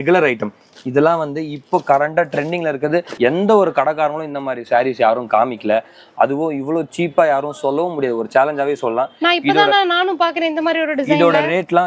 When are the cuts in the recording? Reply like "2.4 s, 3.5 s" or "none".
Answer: 3.1 s